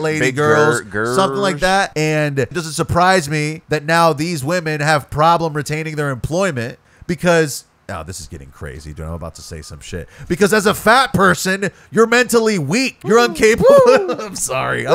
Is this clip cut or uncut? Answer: cut